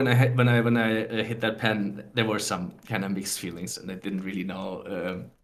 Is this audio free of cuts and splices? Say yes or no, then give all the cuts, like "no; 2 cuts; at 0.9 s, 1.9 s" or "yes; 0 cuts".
yes; 0 cuts